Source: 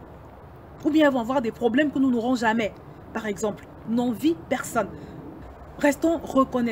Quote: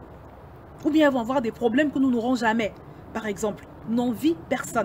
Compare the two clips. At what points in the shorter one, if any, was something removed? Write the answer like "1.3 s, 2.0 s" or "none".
none